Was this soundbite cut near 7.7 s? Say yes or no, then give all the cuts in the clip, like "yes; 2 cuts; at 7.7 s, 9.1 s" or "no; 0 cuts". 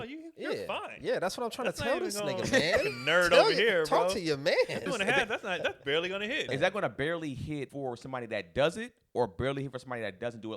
yes; 3 cuts; at 4.9 s, 6.5 s, 7.7 s